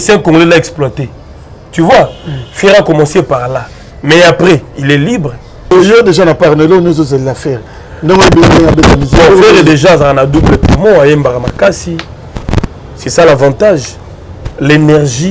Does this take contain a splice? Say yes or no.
yes